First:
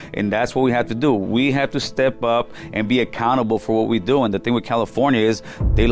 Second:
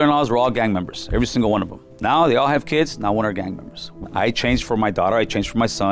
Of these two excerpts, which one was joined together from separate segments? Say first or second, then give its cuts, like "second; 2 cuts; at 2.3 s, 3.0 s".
second; 2 cuts; at 1.8 s, 4.0 s